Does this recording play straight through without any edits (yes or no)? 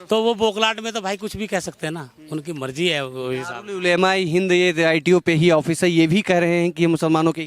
yes